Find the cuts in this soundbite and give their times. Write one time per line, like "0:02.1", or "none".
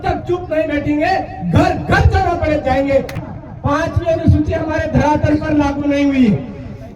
0:03.2